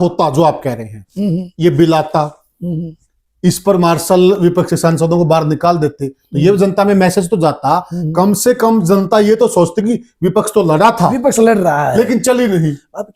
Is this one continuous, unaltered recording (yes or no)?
yes